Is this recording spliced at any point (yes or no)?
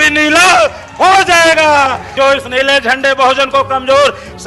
yes